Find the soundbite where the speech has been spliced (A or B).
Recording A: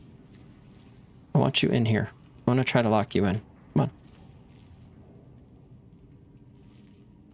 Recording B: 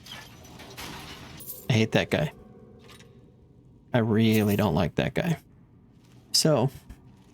B